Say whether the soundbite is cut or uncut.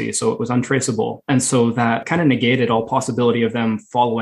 cut